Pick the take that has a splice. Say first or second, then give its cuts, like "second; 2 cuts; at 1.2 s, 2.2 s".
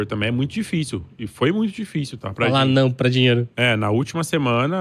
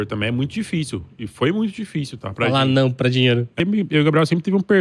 second; 1 cut; at 3.5 s